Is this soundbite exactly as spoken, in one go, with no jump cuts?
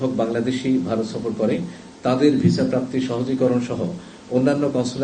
yes; 0 cuts

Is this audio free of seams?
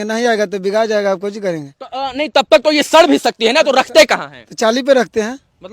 yes; 0 cuts

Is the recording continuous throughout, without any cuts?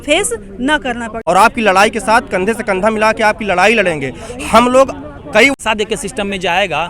no; 2 cuts; at 1.1 s, 5.6 s

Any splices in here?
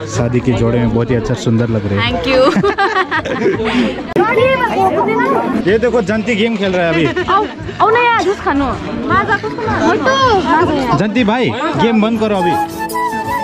no; 0 cuts

